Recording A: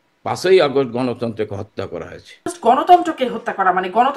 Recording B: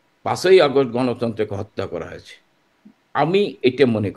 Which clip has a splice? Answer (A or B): A